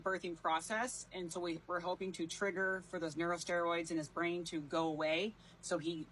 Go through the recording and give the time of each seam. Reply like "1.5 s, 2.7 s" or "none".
none